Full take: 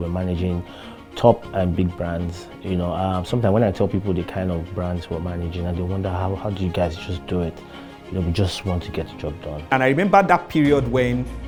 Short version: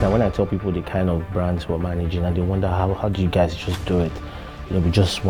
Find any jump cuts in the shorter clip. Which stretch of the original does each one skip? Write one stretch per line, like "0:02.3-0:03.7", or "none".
none